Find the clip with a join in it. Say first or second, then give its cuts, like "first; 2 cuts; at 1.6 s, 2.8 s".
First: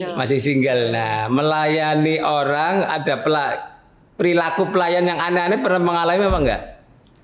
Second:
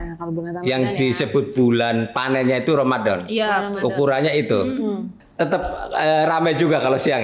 second; 1 cut; at 5.2 s